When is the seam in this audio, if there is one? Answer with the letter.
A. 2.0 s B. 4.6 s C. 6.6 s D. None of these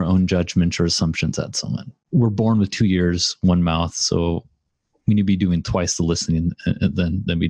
A